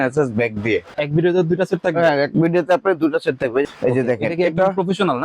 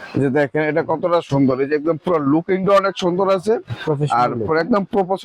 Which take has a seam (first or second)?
first